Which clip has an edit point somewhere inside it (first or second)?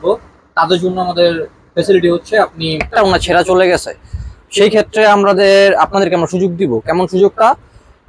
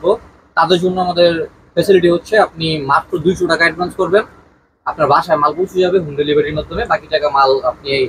first